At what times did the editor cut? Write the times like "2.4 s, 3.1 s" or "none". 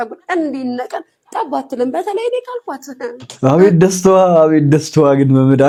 none